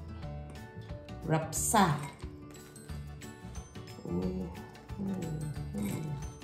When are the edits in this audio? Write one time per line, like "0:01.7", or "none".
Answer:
0:02.2
0:03.7